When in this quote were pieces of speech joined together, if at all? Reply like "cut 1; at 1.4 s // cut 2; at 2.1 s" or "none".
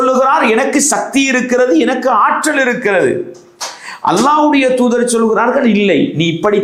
none